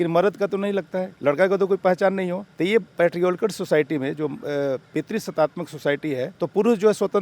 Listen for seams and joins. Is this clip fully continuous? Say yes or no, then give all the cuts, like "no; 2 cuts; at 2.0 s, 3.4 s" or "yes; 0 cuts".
no; 3 cuts; at 1.0 s, 2.4 s, 6.3 s